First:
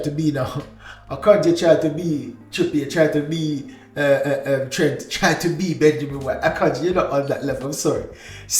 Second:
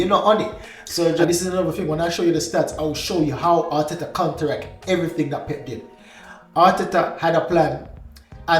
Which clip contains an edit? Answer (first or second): second